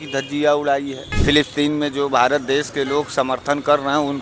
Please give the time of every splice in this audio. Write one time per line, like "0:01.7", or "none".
0:01.0